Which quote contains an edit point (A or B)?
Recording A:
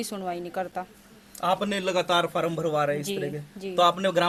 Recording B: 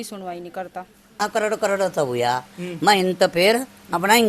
B